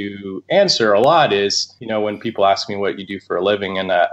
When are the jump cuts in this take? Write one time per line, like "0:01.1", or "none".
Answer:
0:01.7